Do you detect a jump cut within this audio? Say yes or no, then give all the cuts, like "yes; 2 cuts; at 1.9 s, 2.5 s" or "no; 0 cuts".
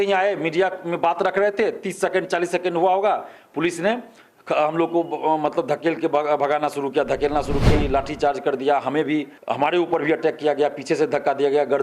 yes; 2 cuts; at 7.6 s, 9.4 s